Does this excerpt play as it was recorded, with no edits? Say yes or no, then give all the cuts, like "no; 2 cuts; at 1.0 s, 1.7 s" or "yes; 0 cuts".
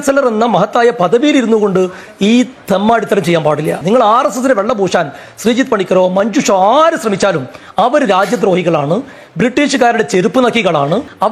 yes; 0 cuts